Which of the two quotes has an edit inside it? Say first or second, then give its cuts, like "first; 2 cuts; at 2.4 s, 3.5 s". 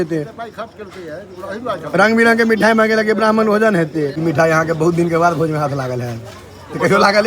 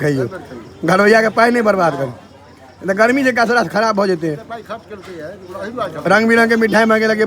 first; 1 cut; at 4.2 s